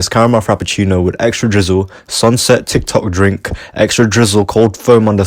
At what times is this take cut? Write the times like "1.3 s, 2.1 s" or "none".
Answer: none